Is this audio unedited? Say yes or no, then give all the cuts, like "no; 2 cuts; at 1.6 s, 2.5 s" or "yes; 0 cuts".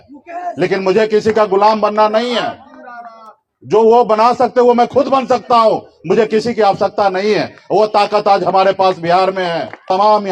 yes; 0 cuts